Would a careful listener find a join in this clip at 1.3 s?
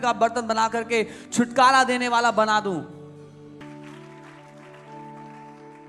no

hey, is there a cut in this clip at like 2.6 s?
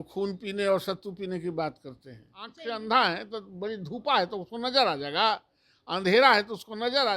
yes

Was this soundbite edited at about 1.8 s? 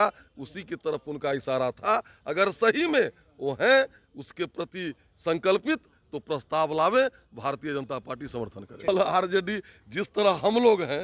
no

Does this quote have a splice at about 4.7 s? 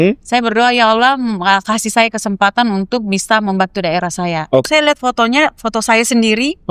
yes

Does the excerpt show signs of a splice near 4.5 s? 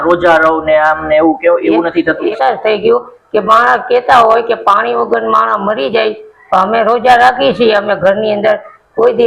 no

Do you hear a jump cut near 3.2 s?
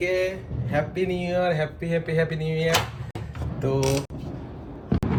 no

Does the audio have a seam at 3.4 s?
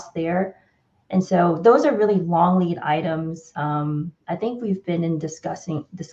yes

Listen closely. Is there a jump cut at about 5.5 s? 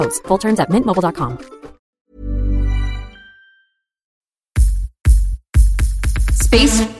no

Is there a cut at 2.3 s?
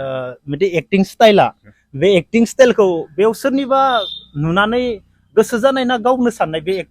no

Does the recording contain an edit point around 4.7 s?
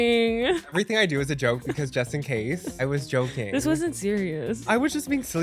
yes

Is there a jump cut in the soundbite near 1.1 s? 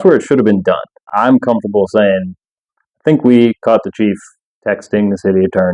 yes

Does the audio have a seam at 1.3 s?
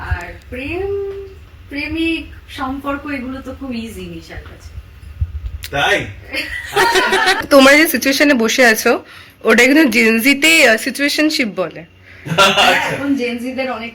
no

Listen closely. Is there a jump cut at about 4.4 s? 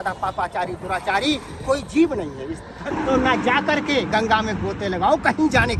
no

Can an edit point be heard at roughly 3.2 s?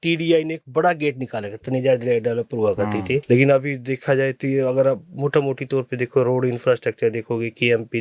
yes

